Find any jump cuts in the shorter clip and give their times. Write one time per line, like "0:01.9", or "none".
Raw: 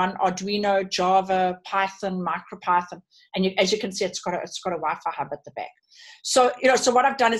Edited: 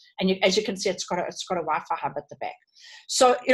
none